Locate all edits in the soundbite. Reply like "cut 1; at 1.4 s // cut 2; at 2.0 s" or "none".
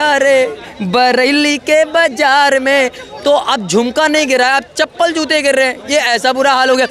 none